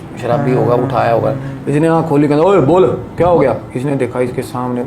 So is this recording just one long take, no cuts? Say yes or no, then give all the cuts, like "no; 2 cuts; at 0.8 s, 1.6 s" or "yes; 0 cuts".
yes; 0 cuts